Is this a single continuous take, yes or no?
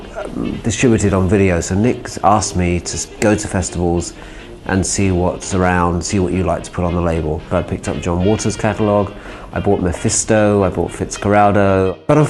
yes